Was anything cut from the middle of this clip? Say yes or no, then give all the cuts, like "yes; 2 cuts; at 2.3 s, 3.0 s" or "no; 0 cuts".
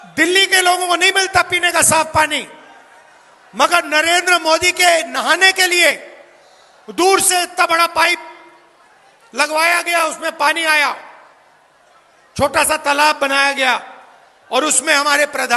no; 0 cuts